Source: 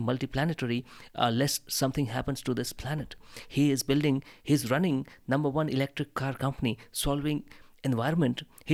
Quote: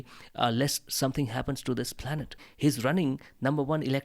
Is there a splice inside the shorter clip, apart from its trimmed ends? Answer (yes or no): yes